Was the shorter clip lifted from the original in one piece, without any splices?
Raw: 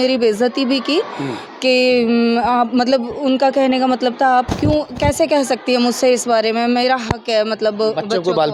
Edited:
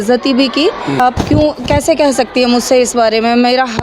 no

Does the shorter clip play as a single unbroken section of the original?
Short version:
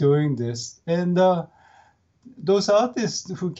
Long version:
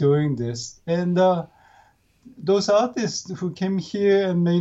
yes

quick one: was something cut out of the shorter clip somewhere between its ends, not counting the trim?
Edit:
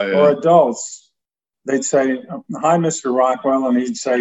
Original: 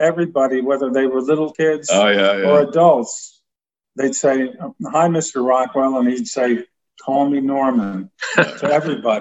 no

